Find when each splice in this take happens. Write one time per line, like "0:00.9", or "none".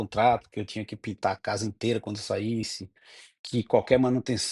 none